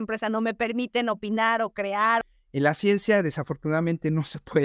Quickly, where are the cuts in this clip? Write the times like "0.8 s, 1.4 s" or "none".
2.2 s